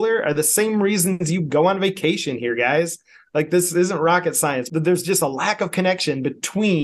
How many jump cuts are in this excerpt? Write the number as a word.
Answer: one